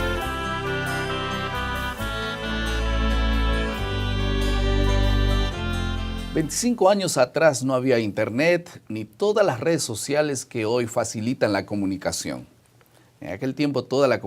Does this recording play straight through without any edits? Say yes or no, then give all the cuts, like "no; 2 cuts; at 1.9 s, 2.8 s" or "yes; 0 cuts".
no; 1 cut; at 5.3 s